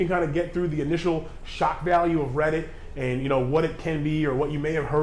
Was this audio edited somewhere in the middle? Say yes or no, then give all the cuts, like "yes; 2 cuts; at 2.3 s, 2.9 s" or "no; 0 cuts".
no; 0 cuts